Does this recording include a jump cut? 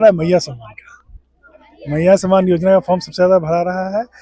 no; 0 cuts

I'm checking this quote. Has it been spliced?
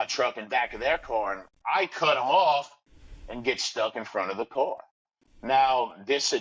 no; 0 cuts

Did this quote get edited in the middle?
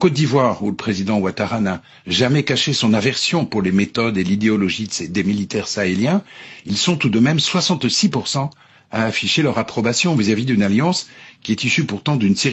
no; 0 cuts

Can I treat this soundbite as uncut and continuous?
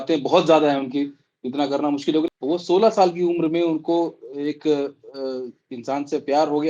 no; 1 cut; at 2.3 s

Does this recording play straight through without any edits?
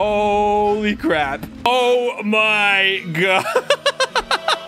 no; 1 cut; at 1.7 s

